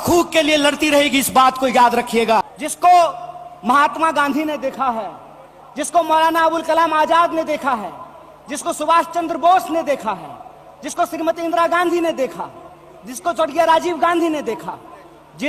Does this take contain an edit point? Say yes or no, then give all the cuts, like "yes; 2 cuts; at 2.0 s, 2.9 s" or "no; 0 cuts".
yes; 1 cut; at 2.6 s